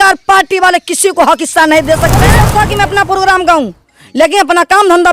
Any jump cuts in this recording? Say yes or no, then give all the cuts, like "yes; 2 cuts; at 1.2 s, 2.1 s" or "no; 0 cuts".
yes; 1 cut; at 2.4 s